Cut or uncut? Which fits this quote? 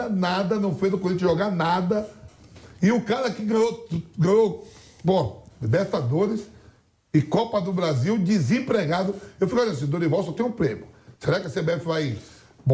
uncut